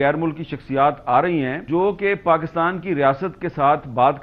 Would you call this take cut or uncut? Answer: cut